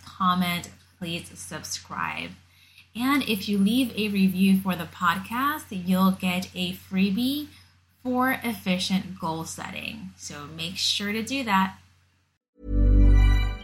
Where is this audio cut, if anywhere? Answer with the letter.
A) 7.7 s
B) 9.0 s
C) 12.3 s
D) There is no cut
C